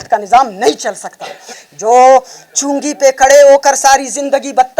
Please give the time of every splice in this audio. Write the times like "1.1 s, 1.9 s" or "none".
1.6 s